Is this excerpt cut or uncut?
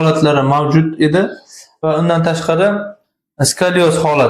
uncut